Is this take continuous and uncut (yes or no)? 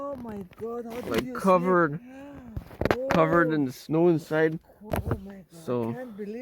no